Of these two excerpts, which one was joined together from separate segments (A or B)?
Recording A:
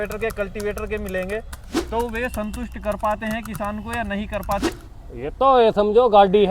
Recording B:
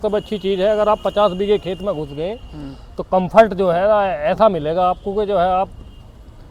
A